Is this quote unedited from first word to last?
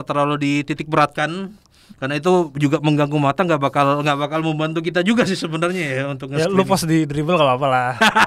yes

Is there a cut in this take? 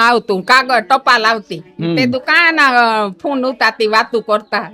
no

